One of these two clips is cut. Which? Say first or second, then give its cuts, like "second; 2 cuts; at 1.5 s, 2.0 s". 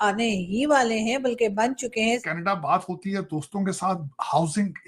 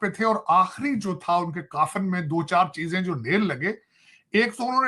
first; 1 cut; at 2.2 s